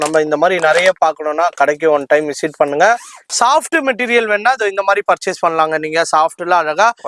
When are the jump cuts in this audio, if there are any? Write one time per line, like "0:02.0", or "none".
0:03.2